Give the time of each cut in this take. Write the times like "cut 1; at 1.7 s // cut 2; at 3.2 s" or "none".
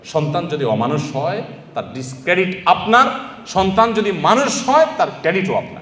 none